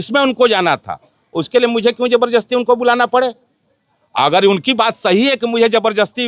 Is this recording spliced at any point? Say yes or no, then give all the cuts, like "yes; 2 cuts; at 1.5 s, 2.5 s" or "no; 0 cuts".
no; 0 cuts